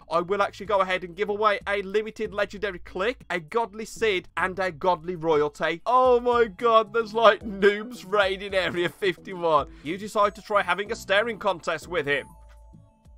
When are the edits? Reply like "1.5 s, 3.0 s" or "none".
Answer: 3.2 s, 4.3 s, 5.8 s, 9.8 s, 12.4 s